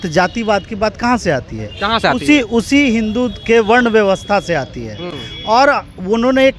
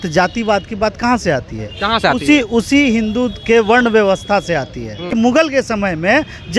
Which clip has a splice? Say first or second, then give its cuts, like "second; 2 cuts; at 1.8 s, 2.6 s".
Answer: second; 1 cut; at 5.1 s